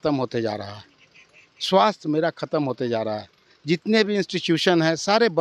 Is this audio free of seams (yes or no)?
yes